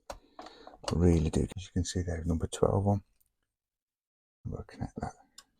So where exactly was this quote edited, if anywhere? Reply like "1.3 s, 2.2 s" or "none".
1.5 s